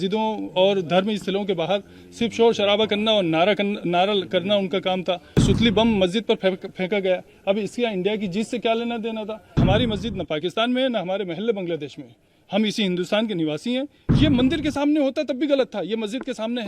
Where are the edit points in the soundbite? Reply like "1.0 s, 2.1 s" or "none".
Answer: 5.4 s, 9.6 s, 14.0 s